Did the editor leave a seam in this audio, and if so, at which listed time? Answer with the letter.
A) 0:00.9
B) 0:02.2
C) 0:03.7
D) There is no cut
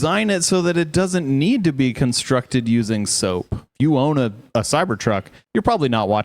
C